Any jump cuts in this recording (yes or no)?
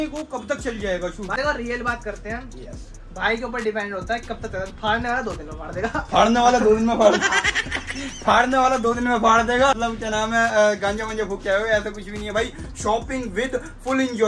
yes